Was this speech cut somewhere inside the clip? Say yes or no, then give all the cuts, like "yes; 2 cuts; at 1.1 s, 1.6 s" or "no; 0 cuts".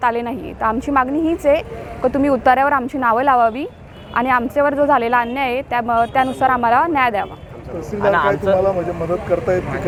no; 0 cuts